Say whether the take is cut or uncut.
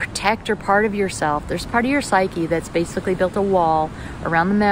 uncut